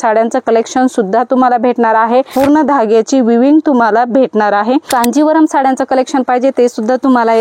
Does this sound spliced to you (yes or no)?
yes